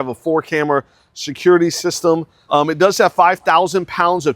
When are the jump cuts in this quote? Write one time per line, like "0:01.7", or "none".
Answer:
0:02.3